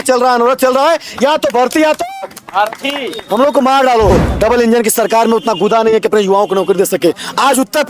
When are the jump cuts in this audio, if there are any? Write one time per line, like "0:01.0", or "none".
0:04.2